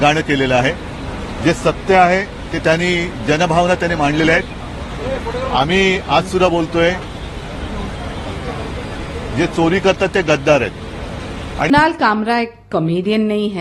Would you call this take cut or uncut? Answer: cut